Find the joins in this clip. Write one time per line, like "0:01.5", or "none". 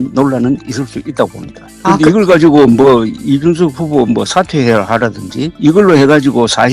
0:05.5